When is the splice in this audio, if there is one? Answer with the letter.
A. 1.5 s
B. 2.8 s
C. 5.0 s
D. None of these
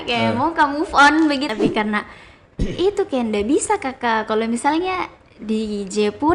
A